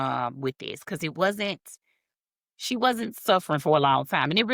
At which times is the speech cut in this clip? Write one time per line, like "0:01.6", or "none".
none